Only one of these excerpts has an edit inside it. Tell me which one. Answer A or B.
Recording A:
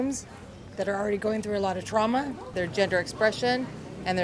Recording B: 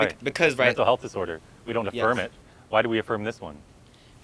A